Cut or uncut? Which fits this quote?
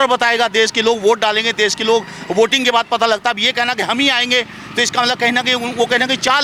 uncut